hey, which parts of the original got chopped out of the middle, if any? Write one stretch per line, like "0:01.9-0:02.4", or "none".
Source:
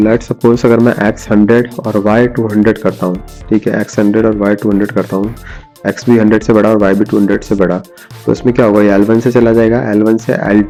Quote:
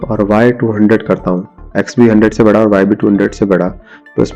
0:03.3-0:05.6